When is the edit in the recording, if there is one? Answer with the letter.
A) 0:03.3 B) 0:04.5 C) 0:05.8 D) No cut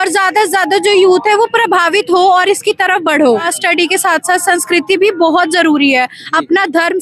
A